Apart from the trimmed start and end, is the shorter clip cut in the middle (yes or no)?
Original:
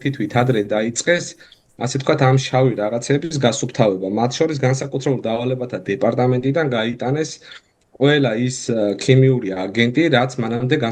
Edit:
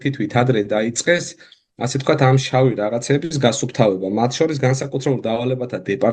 no